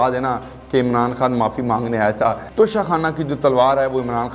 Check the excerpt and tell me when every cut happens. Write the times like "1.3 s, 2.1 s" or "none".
2.4 s